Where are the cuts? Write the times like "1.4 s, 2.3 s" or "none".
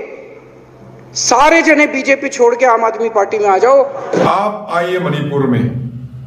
4.3 s